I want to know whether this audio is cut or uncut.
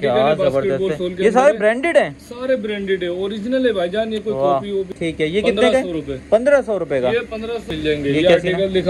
cut